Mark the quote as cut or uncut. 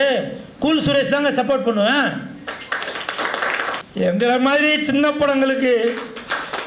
cut